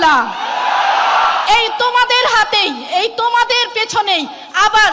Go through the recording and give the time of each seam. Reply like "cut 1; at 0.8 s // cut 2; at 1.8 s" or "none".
none